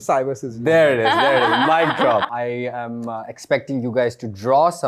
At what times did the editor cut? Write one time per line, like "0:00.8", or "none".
0:02.2

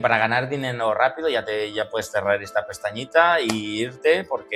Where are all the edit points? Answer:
none

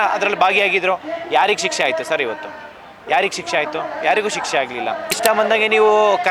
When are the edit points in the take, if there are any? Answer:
0:05.2

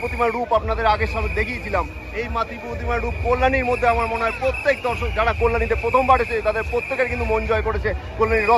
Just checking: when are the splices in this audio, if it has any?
none

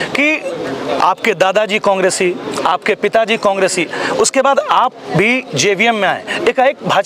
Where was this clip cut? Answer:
none

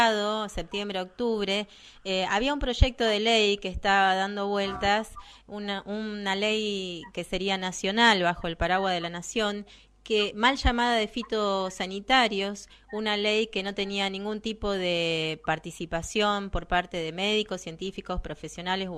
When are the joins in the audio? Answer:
none

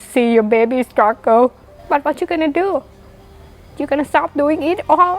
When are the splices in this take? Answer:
0:01.7

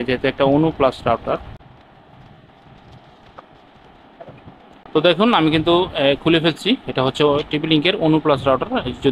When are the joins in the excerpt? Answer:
none

